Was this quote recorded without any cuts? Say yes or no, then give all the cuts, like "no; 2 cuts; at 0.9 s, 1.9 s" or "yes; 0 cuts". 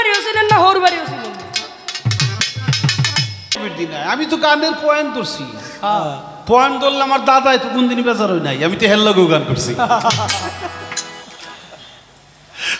no; 1 cut; at 3.6 s